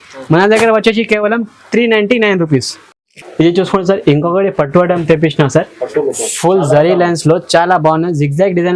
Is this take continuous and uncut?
yes; 0 cuts

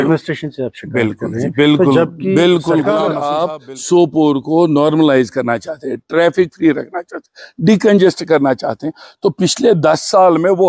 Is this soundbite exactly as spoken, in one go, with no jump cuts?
no; 1 cut; at 3.2 s

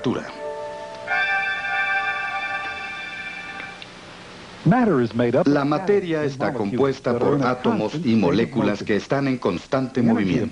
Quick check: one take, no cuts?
no; 1 cut; at 1.5 s

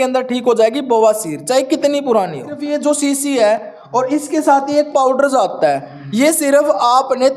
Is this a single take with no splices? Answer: no; 1 cut; at 2.6 s

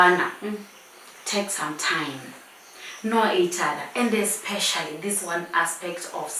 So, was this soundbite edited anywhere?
no; 0 cuts

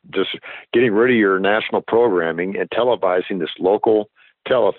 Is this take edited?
no; 0 cuts

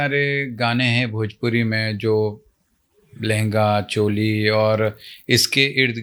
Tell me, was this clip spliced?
no; 0 cuts

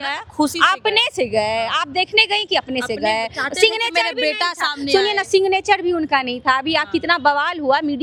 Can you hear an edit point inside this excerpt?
no; 0 cuts

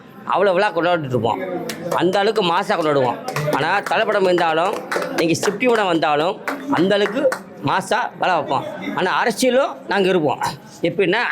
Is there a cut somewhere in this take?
no; 0 cuts

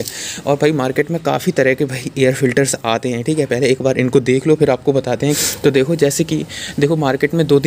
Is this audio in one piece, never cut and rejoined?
no; 1 cut; at 5.4 s

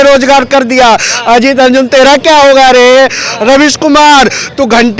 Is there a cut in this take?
no; 0 cuts

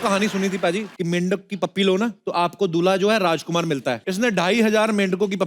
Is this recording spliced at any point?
yes; 3 cuts; at 0.9 s, 2.2 s, 4.1 s

